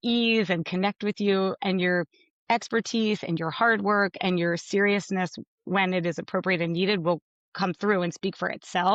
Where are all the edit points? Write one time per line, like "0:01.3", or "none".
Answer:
none